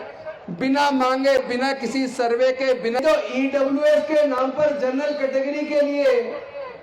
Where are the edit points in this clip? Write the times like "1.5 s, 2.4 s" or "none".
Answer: 3.0 s